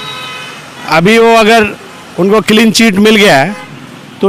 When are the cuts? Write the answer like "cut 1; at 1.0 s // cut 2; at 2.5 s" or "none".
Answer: none